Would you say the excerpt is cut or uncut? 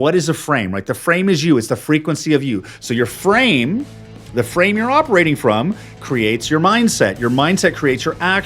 uncut